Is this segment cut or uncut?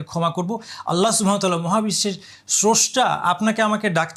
uncut